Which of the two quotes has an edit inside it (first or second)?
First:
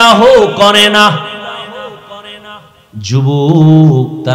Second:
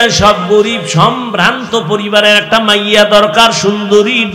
first